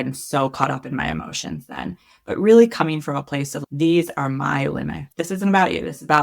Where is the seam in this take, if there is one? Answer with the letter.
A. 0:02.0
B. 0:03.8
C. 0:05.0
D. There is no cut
C